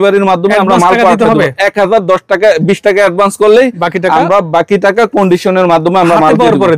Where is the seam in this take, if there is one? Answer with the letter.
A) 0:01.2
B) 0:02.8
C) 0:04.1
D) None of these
D